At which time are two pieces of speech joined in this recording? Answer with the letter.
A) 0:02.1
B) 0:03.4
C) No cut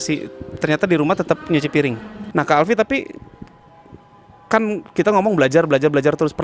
A